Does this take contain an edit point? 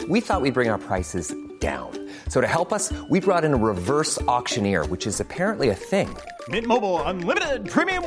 no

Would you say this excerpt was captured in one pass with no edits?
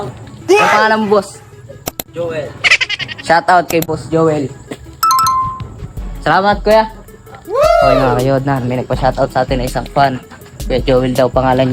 yes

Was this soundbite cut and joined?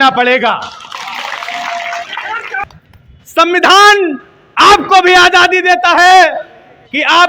yes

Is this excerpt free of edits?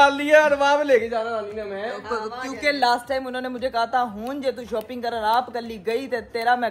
yes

